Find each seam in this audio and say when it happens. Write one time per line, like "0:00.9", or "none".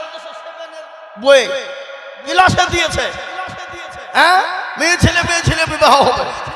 none